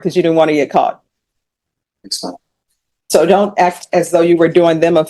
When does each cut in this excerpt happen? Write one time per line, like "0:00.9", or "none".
0:02.4